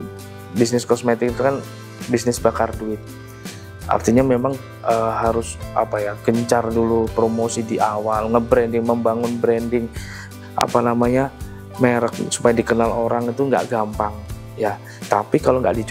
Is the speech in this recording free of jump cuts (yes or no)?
yes